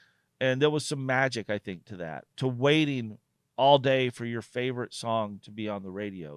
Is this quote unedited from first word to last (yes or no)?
yes